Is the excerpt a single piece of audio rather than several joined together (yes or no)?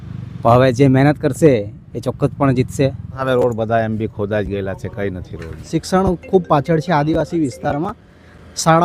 no